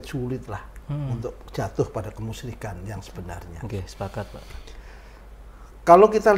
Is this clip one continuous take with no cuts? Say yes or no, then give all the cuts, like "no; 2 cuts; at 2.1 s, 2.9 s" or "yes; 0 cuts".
yes; 0 cuts